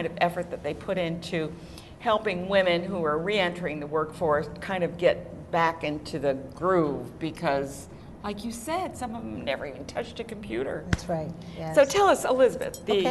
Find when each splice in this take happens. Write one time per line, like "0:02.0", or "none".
0:01.1